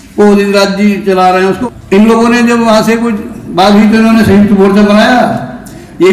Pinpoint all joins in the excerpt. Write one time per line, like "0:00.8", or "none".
0:01.6